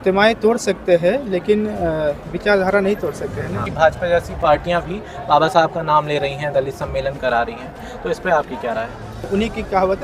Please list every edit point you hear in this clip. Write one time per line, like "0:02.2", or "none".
0:03.7
0:09.2